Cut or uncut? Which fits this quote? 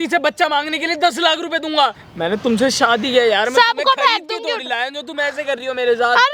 cut